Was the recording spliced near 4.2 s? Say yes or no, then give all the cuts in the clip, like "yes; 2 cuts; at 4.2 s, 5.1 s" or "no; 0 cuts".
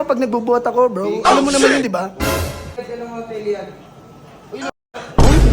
no; 1 cut; at 2.7 s